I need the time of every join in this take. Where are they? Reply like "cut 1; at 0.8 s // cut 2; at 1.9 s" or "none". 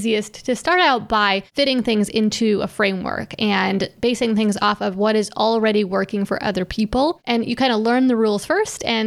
cut 1; at 1.5 s // cut 2; at 7.2 s